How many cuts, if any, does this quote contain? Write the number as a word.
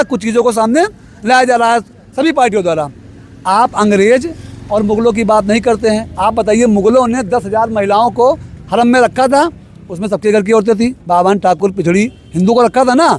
zero